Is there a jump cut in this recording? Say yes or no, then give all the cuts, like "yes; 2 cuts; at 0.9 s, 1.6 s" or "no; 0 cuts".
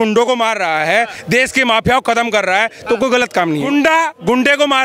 yes; 1 cut; at 3.7 s